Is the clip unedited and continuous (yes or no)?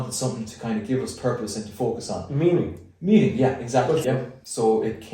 no